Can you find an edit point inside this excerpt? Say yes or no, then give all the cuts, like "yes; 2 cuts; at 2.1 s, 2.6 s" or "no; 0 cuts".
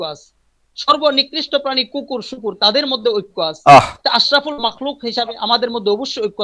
no; 0 cuts